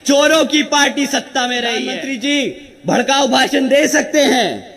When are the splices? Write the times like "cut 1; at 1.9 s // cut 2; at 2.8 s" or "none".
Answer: cut 1; at 1.9 s